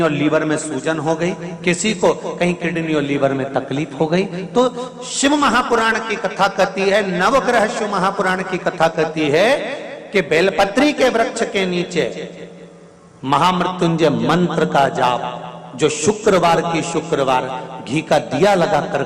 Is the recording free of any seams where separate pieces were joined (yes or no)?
yes